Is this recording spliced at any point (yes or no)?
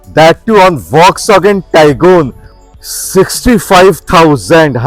yes